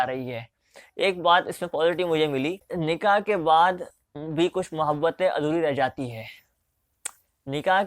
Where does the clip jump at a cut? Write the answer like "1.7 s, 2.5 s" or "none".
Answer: 2.7 s